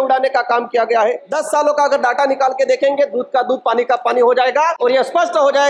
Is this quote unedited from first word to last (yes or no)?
no